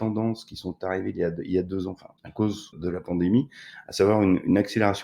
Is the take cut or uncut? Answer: cut